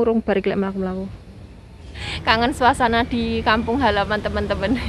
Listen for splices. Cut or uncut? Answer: cut